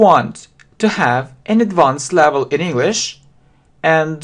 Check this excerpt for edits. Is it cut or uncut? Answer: cut